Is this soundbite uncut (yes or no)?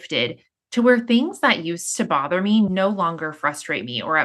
no